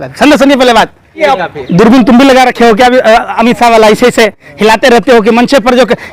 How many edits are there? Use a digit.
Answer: 1